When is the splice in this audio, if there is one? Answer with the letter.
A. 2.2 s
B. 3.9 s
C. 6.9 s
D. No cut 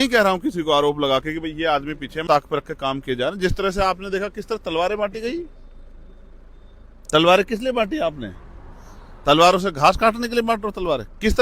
A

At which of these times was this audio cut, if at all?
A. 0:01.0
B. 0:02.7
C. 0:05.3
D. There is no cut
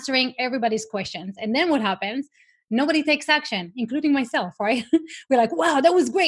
D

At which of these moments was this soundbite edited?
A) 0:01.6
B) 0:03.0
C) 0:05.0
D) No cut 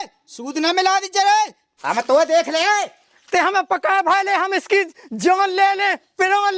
A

